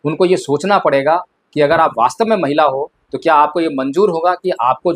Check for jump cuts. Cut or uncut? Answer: uncut